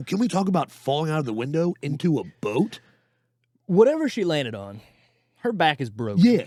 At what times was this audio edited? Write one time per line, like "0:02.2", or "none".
none